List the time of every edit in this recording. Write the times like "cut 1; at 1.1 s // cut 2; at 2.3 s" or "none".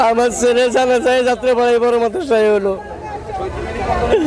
none